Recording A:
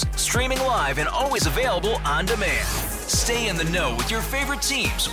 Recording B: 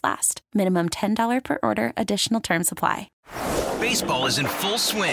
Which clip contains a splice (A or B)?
B